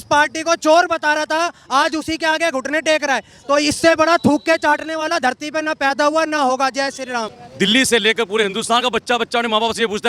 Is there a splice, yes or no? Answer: yes